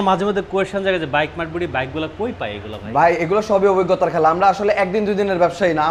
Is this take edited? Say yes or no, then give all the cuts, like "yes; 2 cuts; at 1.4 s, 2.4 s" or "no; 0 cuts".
no; 0 cuts